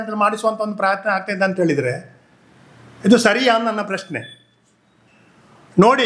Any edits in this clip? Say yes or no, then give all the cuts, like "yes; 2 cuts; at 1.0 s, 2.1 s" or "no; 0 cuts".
no; 0 cuts